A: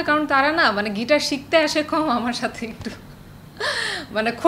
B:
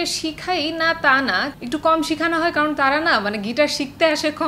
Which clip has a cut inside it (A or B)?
B